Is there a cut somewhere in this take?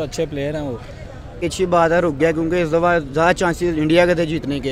yes; 1 cut; at 1.4 s

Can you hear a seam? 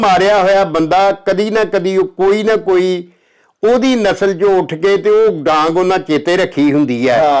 no; 0 cuts

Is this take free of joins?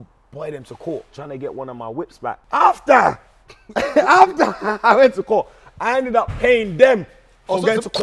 no; 2 cuts; at 1.2 s, 2.4 s

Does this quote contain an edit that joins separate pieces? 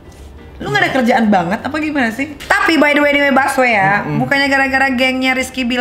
yes; 1 cut; at 2.3 s

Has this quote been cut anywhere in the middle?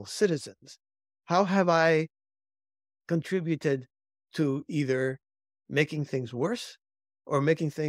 no; 0 cuts

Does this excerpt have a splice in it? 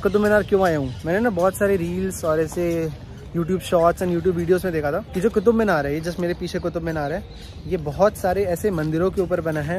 no; 0 cuts

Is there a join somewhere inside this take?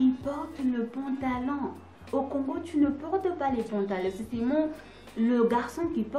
no; 0 cuts

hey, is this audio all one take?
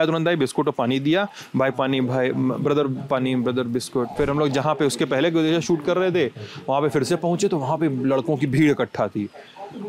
no; 1 cut; at 4.1 s

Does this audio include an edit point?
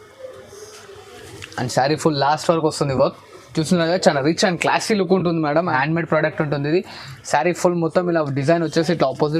yes; 1 cut; at 5.7 s

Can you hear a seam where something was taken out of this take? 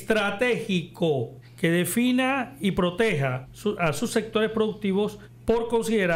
yes; 3 cuts; at 1.4 s, 3.5 s, 5.3 s

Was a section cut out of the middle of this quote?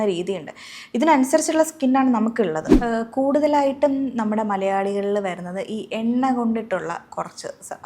yes; 1 cut; at 2.7 s

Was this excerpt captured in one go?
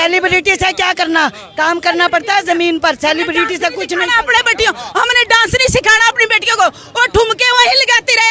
yes; 0 cuts

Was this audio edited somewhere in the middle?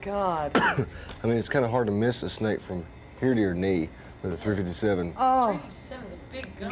no; 0 cuts

